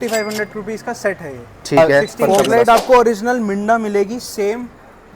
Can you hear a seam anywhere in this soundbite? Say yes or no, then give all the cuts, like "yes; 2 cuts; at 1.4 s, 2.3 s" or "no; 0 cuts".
yes; 1 cut; at 1.8 s